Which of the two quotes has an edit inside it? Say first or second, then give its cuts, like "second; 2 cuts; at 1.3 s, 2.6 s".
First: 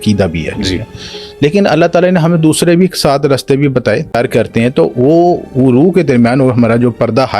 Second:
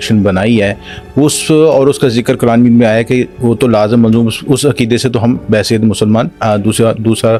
first; 1 cut; at 4.1 s